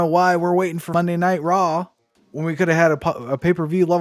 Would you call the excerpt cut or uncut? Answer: cut